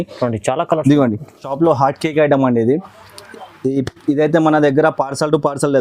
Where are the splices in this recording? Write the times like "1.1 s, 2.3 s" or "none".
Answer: 1.5 s